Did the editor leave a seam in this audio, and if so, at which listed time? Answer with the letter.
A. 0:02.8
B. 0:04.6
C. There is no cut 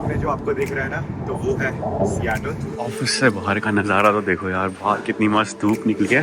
A